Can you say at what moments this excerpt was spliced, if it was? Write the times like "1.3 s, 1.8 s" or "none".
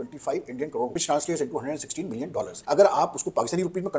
0.9 s, 2.6 s